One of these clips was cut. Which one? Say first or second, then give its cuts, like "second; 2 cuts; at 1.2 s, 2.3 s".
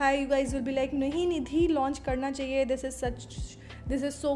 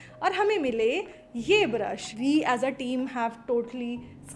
second; 1 cut; at 2.1 s